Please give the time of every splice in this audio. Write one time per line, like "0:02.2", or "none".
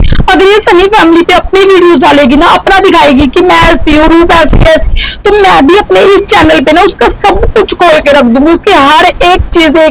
none